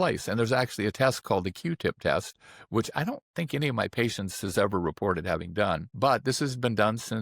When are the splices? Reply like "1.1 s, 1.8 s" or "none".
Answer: 5.9 s

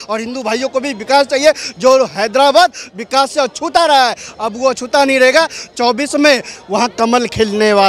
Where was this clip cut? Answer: none

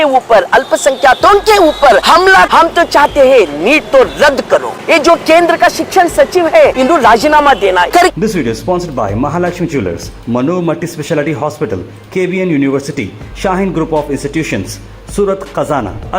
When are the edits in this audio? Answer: 2.3 s, 4.7 s, 6.7 s, 8.0 s

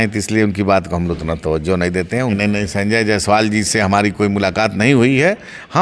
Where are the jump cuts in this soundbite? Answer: 2.3 s

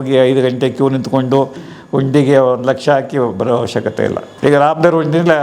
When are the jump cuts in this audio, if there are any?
4.3 s

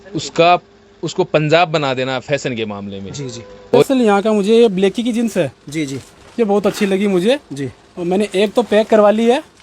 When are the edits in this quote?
3.8 s

